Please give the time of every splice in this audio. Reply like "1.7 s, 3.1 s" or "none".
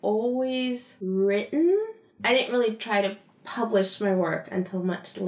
0.9 s